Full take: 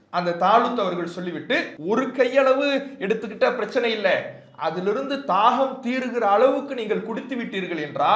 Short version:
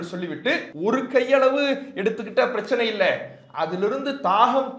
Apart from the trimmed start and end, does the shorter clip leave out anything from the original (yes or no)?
no